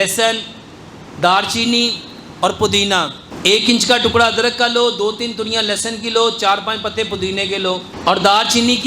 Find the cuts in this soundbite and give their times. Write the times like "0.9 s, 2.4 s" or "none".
3.2 s, 7.9 s